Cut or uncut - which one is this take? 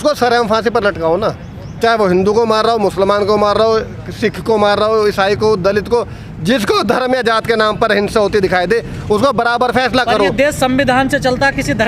uncut